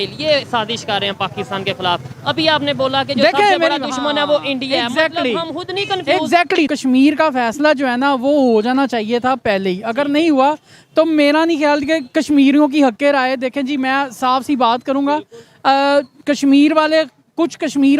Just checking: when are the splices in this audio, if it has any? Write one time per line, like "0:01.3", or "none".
0:06.7